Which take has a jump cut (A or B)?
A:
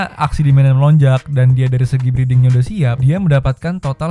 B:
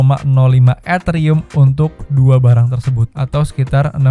B